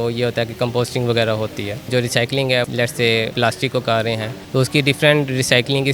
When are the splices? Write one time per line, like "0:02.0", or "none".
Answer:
0:01.9
0:03.2
0:04.3